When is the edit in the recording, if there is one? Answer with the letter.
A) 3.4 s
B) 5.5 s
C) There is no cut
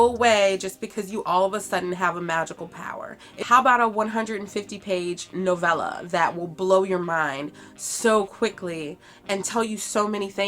A